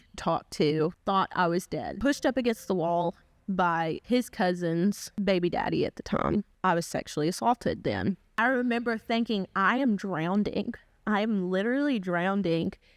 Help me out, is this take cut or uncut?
cut